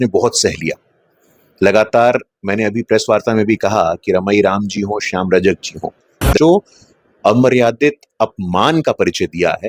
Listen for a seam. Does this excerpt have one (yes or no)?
yes